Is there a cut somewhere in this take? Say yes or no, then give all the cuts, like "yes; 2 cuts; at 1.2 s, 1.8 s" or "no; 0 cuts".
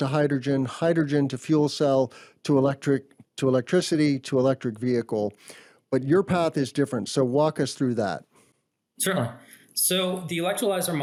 no; 0 cuts